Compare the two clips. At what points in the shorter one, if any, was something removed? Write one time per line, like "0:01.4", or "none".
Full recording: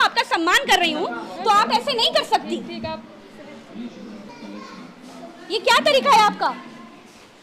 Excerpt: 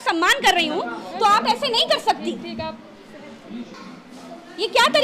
0:03.7